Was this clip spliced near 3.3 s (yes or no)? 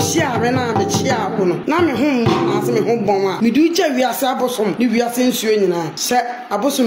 yes